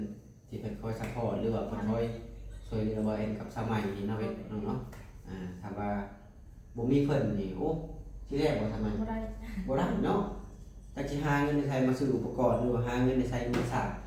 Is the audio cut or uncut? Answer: uncut